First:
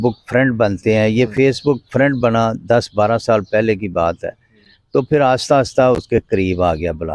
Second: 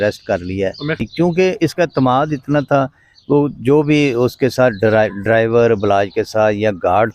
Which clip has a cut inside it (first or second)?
second